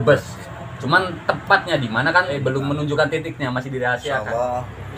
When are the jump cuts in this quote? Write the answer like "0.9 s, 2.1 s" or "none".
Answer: 2.3 s, 4.2 s